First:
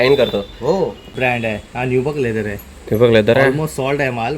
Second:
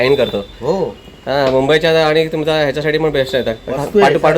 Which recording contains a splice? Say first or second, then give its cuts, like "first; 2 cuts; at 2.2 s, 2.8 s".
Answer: first; 1 cut; at 1.1 s